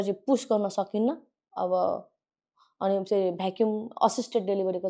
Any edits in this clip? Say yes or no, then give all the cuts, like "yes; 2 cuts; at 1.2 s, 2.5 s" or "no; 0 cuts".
no; 0 cuts